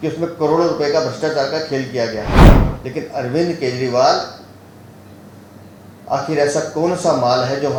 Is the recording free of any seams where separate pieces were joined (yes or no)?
yes